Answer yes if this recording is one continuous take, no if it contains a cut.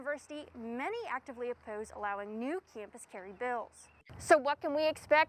no